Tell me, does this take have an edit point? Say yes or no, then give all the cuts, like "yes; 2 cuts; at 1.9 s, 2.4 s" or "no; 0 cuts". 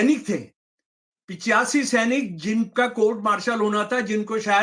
no; 0 cuts